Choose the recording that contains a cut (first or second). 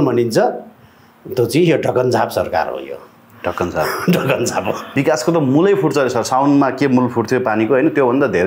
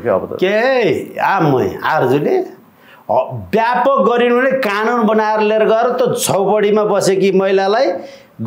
first